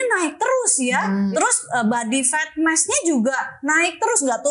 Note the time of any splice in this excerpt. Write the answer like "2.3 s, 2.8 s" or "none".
1.3 s